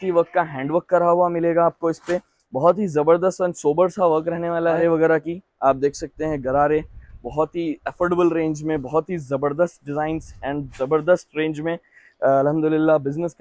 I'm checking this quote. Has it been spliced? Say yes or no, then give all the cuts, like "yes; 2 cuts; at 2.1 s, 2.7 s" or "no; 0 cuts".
yes; 1 cut; at 4.8 s